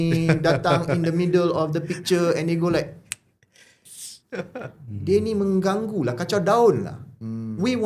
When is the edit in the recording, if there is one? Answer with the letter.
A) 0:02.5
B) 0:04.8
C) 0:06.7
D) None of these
D